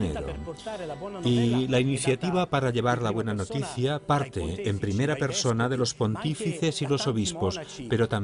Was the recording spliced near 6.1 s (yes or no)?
yes